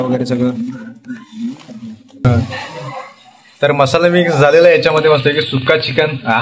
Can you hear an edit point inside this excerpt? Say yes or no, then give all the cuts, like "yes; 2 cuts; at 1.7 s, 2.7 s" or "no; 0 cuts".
yes; 1 cut; at 2.2 s